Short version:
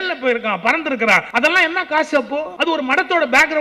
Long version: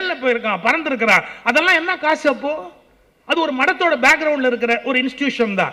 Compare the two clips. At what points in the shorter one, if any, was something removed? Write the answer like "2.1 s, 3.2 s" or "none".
1.3 s, 2.8 s